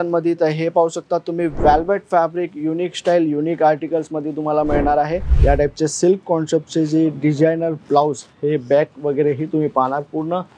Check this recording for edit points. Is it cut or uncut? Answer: cut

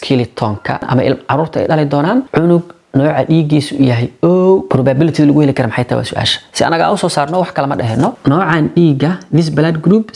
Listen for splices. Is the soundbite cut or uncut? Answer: cut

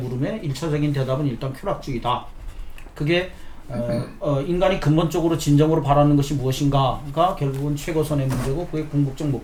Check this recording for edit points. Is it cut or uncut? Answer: uncut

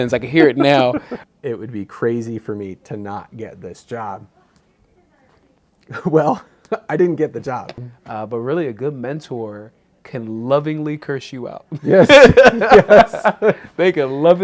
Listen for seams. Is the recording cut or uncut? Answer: cut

